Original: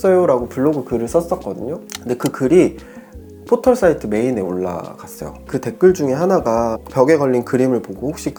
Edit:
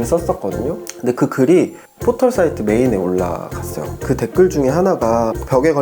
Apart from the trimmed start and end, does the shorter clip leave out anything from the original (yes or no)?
yes